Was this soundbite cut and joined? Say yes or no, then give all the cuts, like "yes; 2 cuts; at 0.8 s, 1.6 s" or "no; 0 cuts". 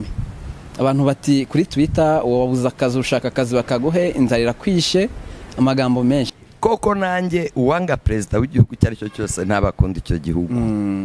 yes; 1 cut; at 6.3 s